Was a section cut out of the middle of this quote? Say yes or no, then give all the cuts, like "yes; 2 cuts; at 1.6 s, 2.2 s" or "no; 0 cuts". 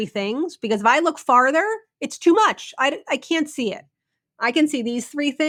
no; 0 cuts